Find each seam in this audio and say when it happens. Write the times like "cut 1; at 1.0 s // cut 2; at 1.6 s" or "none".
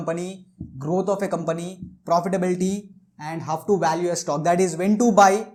none